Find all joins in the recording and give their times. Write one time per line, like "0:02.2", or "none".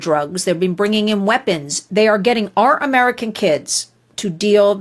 0:01.8

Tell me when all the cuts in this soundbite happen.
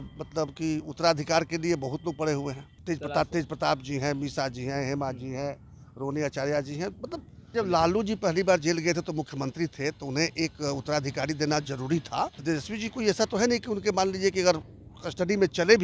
0:02.7
0:07.5
0:12.4

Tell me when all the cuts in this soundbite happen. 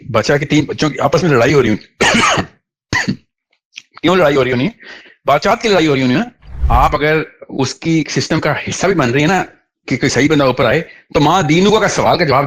0:06.6

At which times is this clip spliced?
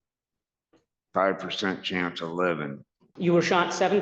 0:03.0

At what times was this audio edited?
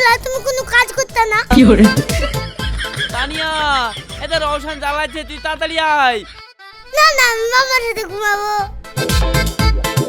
none

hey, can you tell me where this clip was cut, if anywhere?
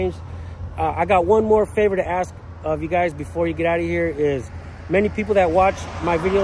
none

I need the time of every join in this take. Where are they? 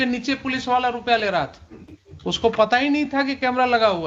0:02.4

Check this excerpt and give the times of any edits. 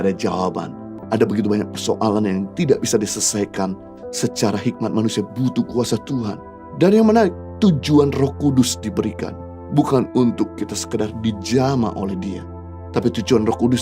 0:00.9

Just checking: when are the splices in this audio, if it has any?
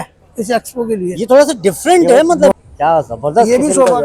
0:02.5

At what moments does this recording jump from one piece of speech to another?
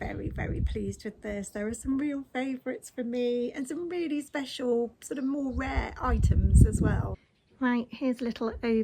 0:07.1

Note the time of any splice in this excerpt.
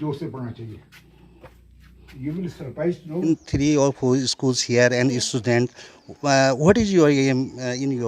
0:03.3

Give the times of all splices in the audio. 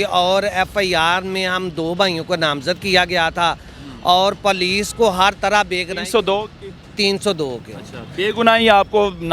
none

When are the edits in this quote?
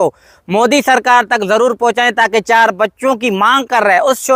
none

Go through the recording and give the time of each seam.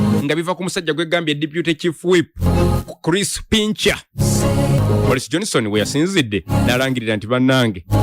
0:04.8

